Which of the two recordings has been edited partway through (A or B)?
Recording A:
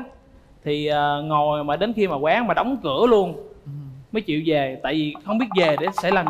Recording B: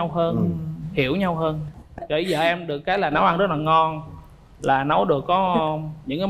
B